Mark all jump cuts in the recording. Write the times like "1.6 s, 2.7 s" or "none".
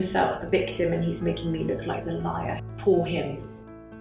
2.6 s